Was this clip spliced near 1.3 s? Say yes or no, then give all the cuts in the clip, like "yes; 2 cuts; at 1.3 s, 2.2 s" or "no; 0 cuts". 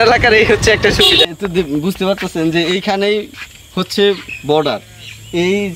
yes; 1 cut; at 1.3 s